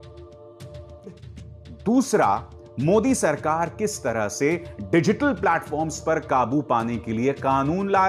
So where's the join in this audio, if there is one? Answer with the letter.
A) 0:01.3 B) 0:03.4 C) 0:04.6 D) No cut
A